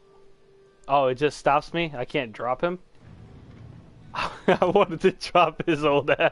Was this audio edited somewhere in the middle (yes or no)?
no